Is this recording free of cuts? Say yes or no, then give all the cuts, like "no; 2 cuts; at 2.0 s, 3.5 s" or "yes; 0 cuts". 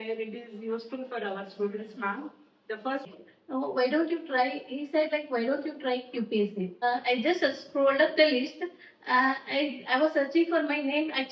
no; 2 cuts; at 3.1 s, 6.9 s